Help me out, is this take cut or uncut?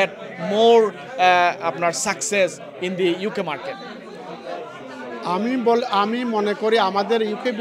uncut